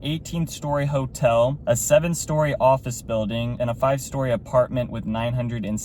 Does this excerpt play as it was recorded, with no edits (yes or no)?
no